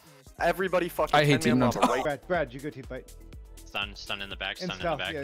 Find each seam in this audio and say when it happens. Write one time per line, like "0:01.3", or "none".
0:02.0